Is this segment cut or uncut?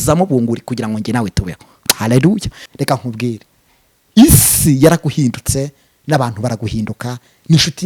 cut